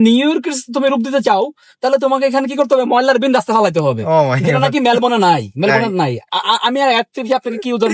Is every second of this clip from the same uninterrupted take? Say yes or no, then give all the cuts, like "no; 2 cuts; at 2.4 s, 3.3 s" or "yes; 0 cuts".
yes; 0 cuts